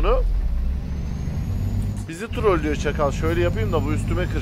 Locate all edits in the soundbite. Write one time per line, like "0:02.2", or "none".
none